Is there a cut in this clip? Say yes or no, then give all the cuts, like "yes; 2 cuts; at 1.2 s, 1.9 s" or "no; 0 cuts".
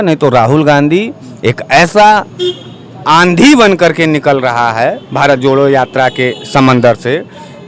no; 0 cuts